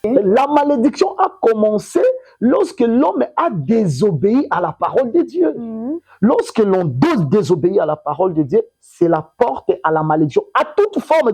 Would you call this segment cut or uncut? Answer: uncut